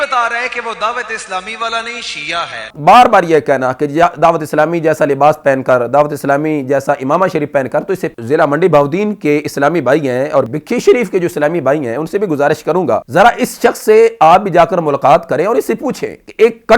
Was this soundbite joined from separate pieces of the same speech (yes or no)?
yes